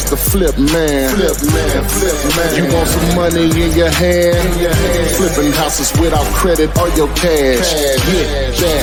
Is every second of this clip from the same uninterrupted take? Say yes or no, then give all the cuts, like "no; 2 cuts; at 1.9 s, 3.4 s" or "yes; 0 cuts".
yes; 0 cuts